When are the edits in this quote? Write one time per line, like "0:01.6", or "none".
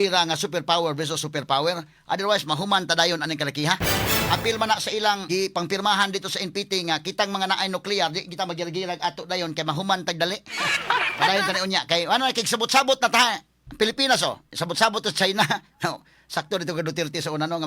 0:05.2
0:10.7